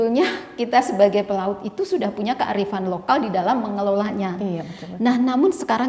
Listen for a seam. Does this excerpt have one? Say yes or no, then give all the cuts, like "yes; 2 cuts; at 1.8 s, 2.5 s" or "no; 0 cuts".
no; 0 cuts